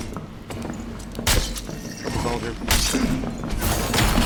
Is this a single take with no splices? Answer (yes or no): yes